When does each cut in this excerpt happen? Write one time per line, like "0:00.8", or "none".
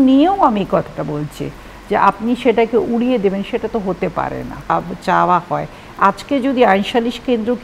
0:04.7